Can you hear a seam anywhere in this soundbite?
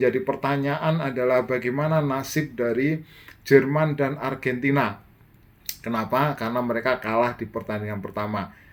no; 0 cuts

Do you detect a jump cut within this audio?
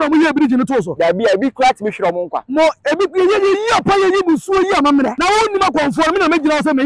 yes; 1 cut; at 5.2 s

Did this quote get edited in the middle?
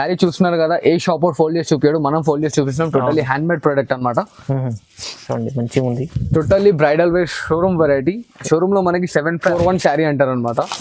yes; 1 cut; at 9.5 s

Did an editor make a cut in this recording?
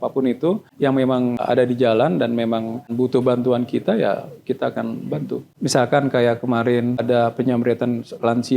yes; 4 cuts; at 1.0 s, 2.9 s, 5.5 s, 7.0 s

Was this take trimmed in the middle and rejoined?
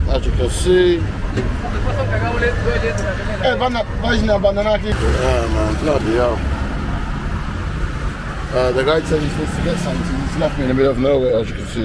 yes; 1 cut; at 4.9 s

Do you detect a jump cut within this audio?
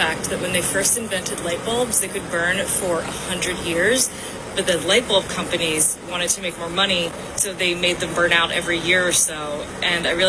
no; 0 cuts

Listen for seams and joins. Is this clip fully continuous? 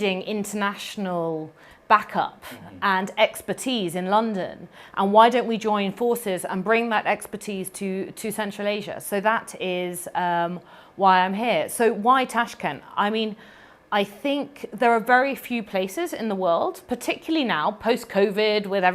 yes; 0 cuts

